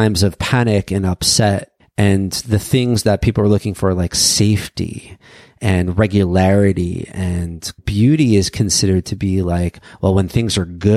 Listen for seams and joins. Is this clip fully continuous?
no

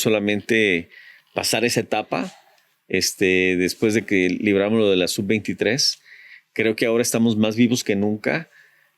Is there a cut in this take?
no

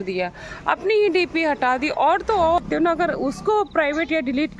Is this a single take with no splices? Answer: no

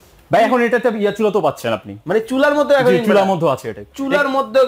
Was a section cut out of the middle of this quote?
no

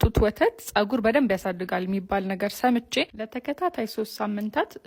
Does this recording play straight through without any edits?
yes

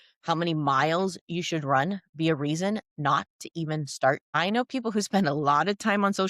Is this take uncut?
no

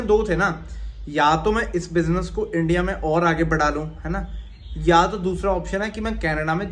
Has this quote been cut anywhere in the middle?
no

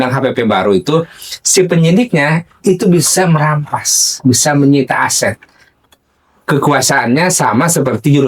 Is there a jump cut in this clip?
no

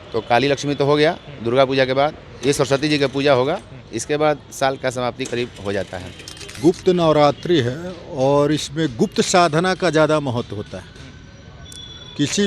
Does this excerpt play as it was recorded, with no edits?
no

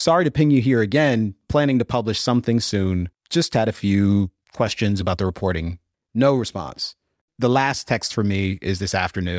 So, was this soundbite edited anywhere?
yes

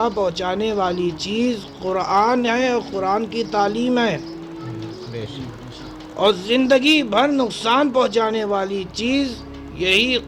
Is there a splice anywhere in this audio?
no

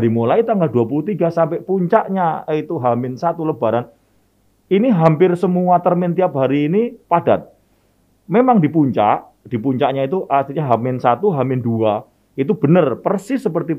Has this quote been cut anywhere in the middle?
no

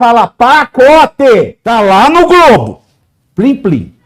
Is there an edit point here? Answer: yes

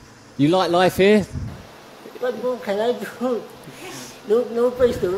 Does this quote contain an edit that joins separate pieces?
no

